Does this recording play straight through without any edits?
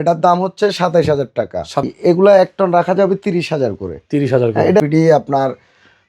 no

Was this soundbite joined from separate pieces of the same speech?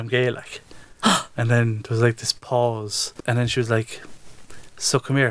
yes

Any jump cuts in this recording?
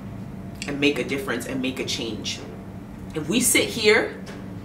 no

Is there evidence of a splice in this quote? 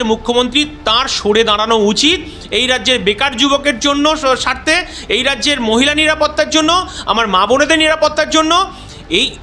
no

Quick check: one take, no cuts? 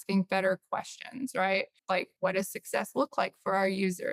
no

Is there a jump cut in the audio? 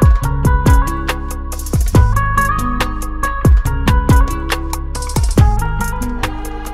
no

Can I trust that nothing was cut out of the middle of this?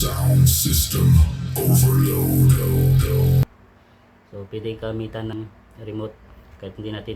no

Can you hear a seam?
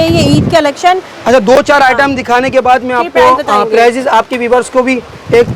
no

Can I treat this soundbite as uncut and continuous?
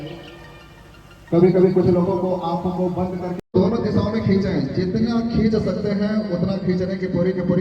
no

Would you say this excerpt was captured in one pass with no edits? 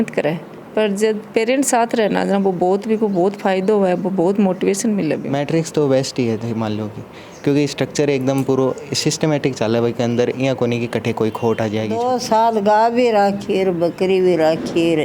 no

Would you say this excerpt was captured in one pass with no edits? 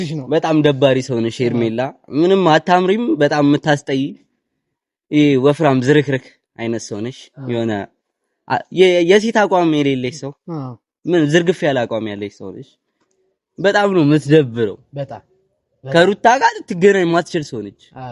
yes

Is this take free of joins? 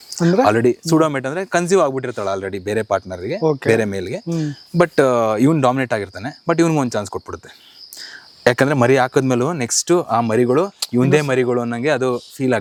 yes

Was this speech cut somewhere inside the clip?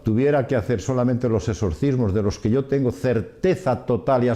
no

